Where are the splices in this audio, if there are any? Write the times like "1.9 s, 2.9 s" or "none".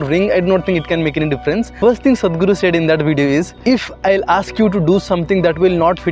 1.7 s, 3.5 s